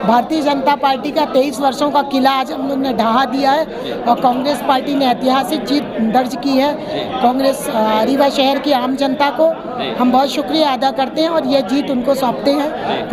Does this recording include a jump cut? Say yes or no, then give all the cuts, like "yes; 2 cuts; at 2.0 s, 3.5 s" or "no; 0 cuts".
no; 0 cuts